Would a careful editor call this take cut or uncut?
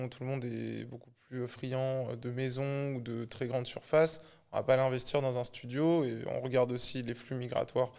uncut